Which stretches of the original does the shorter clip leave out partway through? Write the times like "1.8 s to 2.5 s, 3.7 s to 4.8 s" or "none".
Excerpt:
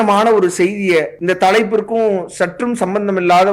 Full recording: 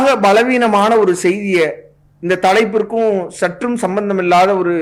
1.8 s to 2.2 s